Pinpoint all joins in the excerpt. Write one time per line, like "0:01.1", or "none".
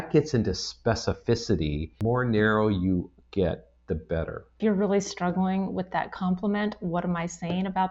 0:02.0
0:04.5

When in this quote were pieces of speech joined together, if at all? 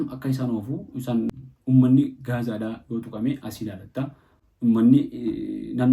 0:01.3

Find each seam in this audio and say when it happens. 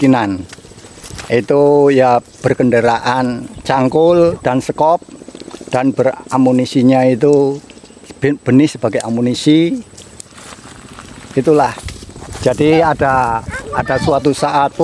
none

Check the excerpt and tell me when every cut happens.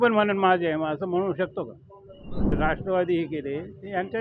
0:02.5

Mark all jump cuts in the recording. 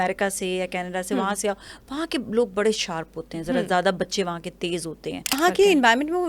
0:05.4

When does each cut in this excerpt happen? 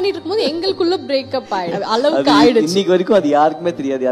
0:01.7

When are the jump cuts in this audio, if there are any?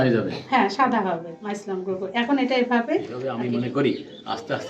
0:03.3

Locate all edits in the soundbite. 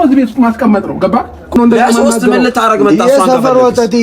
0:01.6

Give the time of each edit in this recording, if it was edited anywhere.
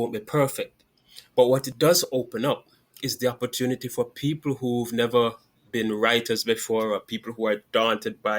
none

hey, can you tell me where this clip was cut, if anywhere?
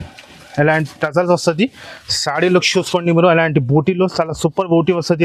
none

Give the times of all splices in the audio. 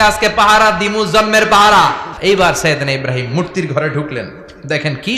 0:02.1

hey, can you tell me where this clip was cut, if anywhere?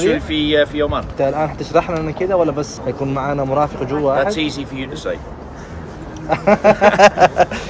0:01.1
0:02.7

